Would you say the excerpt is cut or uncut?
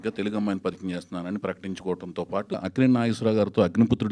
cut